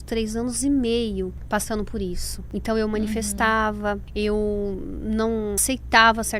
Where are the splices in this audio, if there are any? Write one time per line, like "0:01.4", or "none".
0:01.4
0:02.3
0:04.1
0:05.6